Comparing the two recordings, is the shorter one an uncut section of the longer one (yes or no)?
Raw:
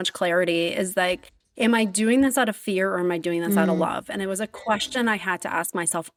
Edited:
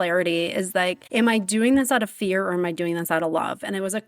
no